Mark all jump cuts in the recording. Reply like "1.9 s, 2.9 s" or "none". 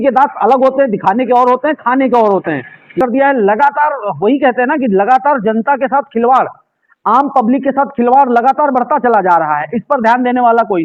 3.0 s